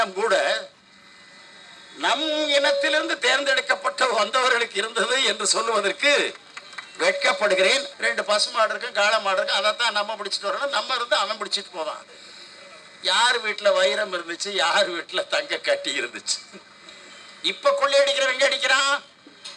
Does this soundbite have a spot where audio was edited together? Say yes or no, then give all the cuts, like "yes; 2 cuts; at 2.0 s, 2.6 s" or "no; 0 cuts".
yes; 1 cut; at 7.9 s